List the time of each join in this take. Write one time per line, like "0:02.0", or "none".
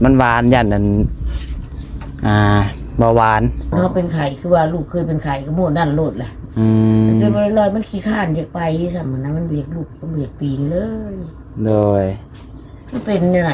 0:03.7